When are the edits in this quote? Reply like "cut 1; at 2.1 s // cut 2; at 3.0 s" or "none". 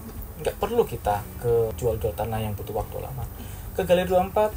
cut 1; at 1.7 s